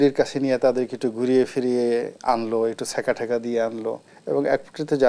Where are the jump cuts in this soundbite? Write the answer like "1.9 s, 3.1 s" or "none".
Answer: 4.1 s